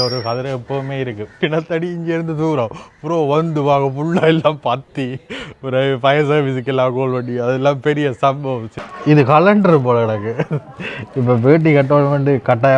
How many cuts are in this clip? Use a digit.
2